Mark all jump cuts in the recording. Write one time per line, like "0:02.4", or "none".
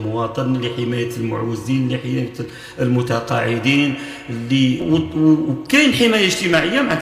0:04.8